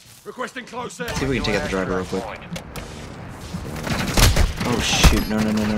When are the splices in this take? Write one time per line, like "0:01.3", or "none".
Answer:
0:01.1